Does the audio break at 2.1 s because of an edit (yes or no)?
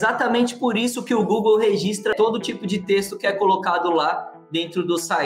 yes